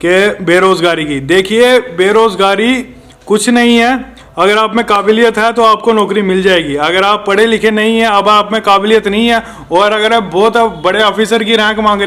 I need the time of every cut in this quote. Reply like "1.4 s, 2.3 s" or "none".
none